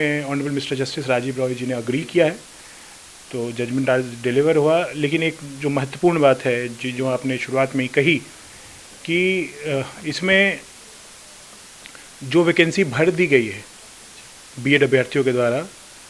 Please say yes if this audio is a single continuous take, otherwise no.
yes